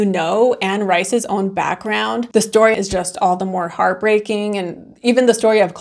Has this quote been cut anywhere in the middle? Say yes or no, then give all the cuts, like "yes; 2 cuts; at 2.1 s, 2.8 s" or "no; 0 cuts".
yes; 1 cut; at 2.7 s